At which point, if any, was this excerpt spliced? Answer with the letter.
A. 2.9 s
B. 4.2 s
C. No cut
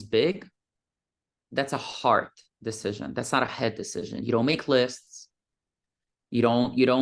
C